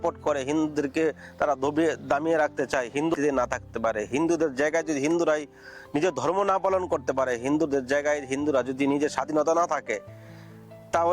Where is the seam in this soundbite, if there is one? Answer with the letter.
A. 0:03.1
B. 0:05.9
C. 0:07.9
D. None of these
A